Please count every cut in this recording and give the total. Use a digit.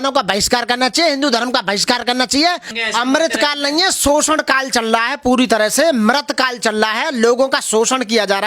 1